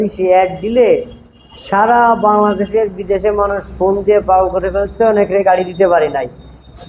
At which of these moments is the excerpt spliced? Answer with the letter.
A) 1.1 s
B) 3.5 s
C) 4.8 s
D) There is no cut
D